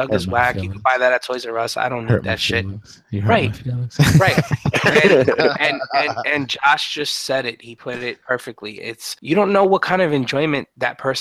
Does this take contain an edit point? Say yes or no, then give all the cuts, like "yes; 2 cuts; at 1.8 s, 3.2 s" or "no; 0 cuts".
yes; 1 cut; at 8.2 s